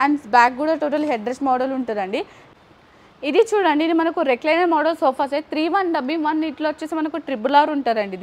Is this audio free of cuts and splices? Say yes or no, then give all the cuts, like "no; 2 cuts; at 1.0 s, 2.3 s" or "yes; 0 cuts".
no; 1 cut; at 2.4 s